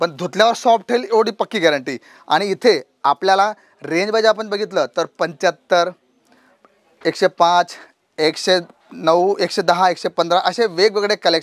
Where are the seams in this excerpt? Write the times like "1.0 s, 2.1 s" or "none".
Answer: none